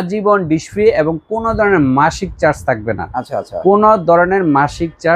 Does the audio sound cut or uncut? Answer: uncut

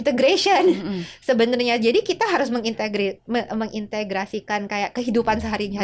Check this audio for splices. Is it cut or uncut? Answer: uncut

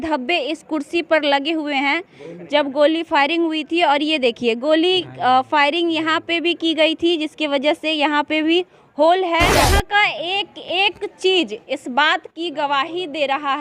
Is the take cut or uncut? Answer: cut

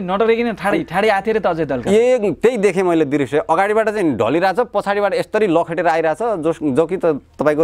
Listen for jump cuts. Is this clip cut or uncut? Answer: uncut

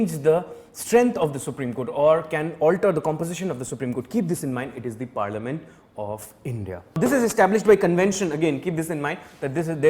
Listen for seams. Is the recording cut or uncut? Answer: cut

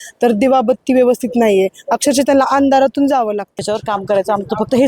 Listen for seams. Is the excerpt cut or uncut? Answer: cut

